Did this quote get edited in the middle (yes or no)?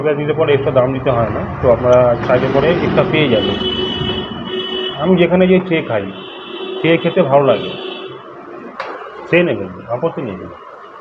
yes